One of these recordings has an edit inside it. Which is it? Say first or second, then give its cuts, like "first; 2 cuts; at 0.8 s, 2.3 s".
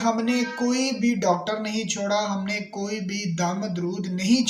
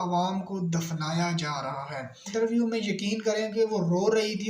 second; 1 cut; at 2.3 s